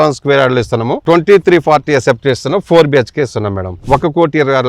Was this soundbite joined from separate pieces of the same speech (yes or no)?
yes